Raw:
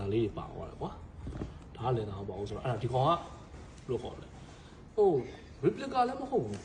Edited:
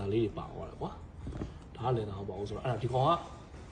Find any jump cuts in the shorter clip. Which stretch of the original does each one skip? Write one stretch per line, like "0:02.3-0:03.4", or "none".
none